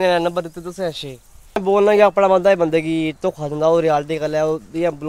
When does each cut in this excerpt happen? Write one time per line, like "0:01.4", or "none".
0:01.6